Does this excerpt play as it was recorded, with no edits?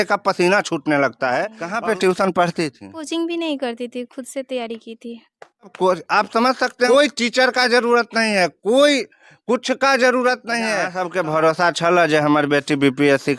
no; 5 cuts; at 1.6 s, 3.0 s, 5.7 s, 6.9 s, 10.9 s

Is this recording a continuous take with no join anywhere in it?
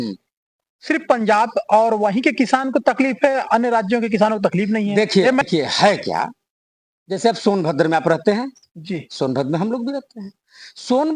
yes; 0 cuts

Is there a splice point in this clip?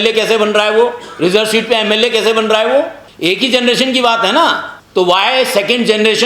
yes; 2 cuts; at 3.0 s, 4.7 s

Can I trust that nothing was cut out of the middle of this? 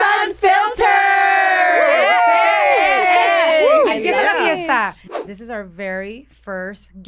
no; 1 cut; at 5.0 s

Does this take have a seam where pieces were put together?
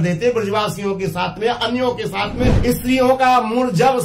yes; 1 cut; at 2.6 s

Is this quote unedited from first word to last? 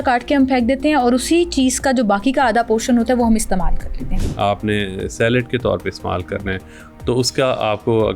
no; 1 cut; at 4.1 s

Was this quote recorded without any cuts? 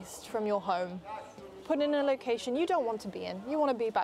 yes; 0 cuts

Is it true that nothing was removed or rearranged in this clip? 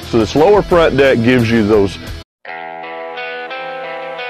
yes; 0 cuts

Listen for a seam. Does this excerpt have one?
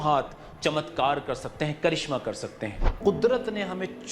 yes; 1 cut; at 2.8 s

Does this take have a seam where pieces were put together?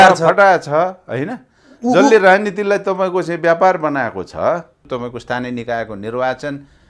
yes; 1 cut; at 4.8 s

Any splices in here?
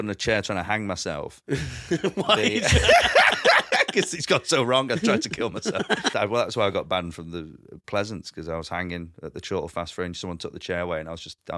yes; 1 cut; at 6.1 s

